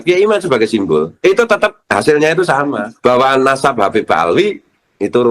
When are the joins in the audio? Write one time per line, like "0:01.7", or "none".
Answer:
0:01.1
0:01.8
0:02.8